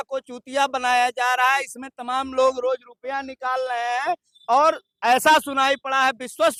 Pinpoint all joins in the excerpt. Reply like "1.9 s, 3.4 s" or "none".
none